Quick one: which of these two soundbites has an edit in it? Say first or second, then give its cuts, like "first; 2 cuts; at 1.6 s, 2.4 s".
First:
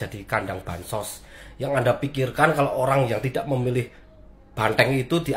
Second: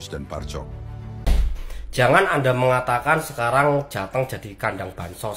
second; 1 cut; at 1.3 s